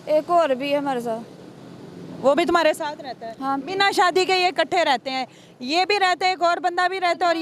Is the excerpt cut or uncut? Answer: uncut